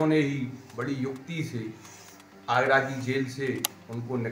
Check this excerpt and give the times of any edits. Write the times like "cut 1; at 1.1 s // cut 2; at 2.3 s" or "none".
none